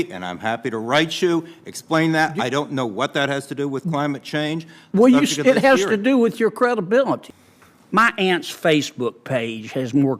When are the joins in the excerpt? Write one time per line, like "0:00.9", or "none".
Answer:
0:07.3